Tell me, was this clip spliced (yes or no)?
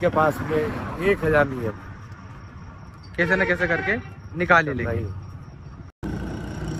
no